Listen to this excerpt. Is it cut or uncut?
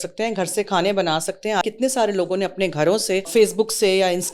cut